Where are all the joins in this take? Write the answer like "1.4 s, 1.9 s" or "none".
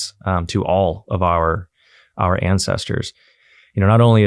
3.3 s

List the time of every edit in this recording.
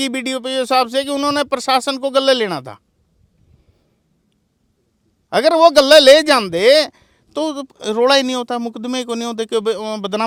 none

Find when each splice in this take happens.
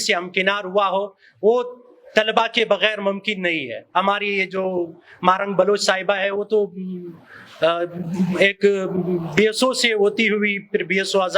3.8 s

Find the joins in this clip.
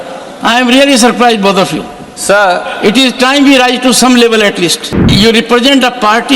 4.9 s

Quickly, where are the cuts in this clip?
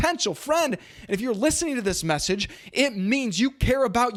none

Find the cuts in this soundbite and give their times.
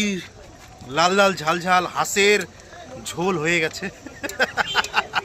none

